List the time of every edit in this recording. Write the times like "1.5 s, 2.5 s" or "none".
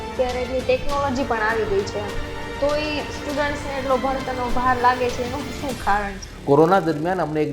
6.2 s

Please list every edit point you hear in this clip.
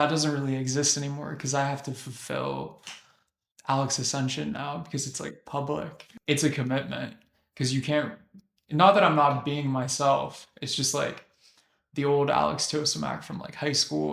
6.0 s

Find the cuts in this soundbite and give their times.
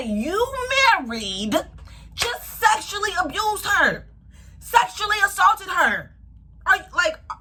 none

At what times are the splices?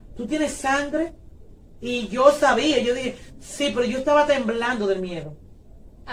none

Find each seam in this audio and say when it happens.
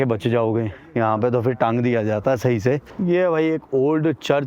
2.9 s

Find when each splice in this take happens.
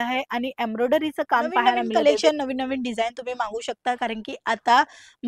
1.9 s

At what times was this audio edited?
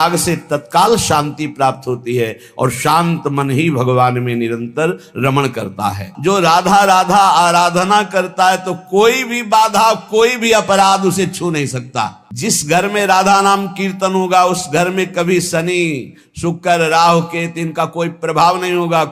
6.1 s, 12.2 s

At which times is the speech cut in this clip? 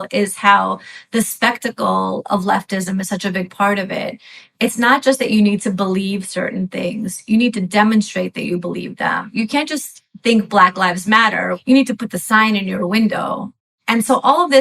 11.6 s

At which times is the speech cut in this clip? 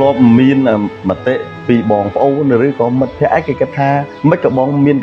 0.9 s, 4.1 s

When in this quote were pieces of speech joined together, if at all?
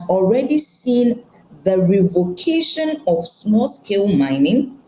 none

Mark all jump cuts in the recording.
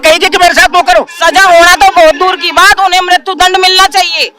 1.1 s

